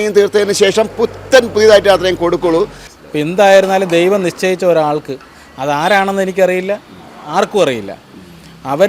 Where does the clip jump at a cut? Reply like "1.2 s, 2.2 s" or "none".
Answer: 2.9 s